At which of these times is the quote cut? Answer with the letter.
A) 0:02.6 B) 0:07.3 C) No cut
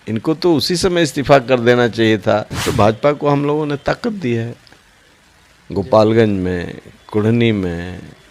A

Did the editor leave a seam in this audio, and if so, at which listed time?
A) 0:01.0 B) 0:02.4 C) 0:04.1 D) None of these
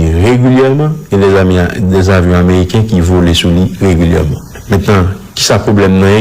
C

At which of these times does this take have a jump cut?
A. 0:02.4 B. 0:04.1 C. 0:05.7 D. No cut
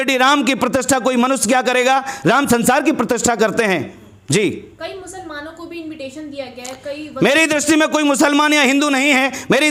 D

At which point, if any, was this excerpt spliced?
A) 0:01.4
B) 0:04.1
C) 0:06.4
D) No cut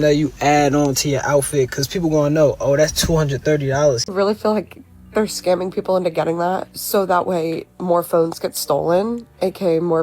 B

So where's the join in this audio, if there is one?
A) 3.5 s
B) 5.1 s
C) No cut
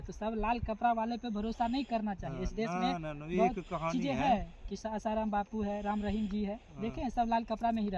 C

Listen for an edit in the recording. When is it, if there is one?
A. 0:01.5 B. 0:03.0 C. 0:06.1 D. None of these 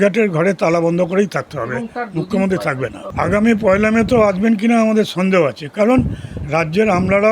B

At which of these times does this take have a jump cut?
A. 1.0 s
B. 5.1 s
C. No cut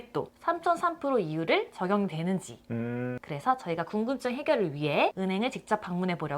B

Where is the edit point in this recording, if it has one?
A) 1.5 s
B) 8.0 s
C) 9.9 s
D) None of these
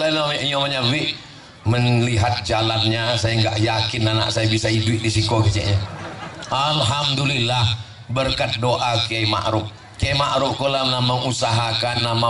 D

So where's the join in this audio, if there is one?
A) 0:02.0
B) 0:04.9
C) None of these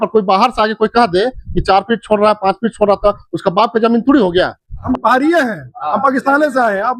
B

